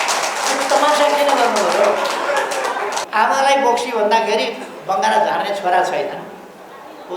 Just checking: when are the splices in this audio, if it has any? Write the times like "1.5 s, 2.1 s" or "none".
3.0 s

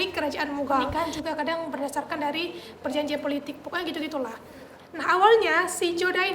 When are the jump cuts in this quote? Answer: 0.9 s

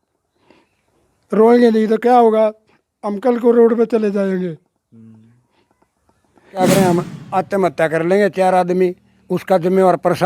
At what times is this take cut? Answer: 6.6 s

